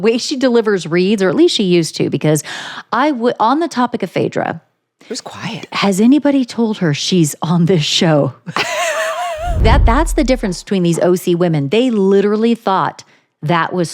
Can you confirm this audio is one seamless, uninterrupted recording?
no; 1 cut; at 9.6 s

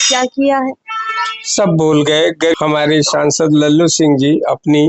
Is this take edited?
yes; 1 cut; at 2.5 s

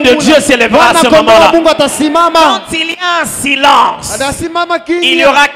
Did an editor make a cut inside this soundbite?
no; 0 cuts

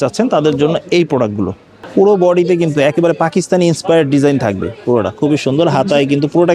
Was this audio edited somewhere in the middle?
yes; 1 cut; at 1.7 s

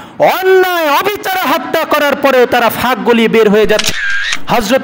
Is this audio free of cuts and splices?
no; 1 cut; at 3.9 s

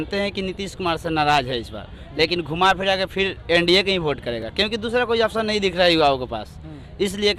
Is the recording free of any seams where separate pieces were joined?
yes; 0 cuts

